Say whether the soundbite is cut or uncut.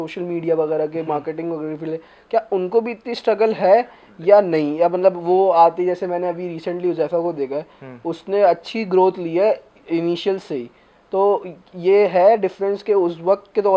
uncut